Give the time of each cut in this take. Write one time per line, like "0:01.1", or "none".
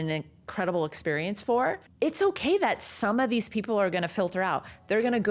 0:01.8